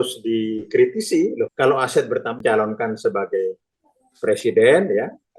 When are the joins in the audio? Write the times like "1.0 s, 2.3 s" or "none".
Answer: 1.5 s, 2.4 s